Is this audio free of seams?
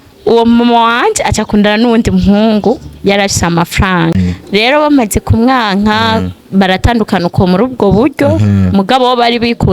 no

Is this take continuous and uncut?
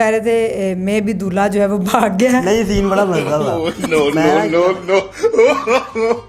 yes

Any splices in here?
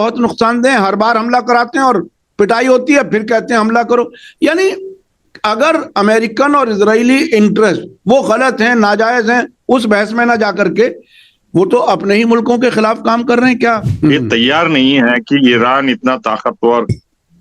yes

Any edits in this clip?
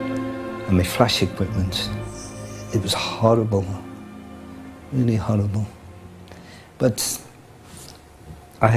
no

